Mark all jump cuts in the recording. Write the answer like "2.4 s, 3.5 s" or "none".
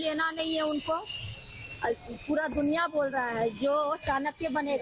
1.0 s